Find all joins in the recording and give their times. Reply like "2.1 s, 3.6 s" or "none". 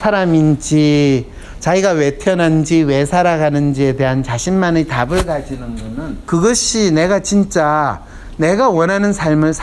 6.3 s

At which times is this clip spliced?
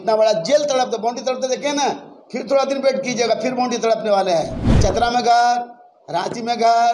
4.6 s

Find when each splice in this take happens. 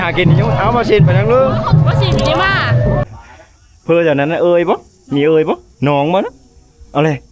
3.0 s

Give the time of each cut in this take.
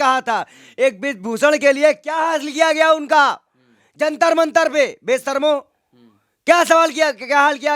none

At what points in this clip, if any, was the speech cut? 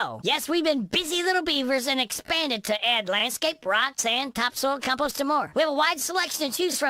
none

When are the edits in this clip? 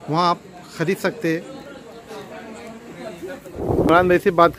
3.6 s

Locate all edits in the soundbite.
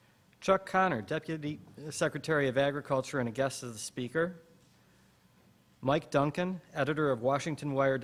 2.3 s

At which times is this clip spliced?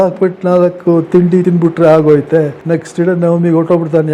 1.4 s, 2.6 s

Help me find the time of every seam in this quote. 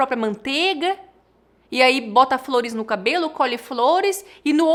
none

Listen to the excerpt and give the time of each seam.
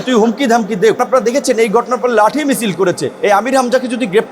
1.0 s, 3.1 s

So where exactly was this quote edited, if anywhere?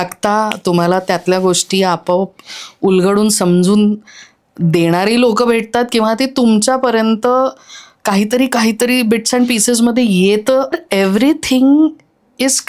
10.8 s

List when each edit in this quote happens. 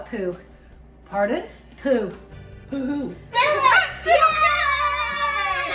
3.2 s

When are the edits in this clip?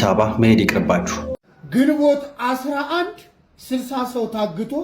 1.3 s

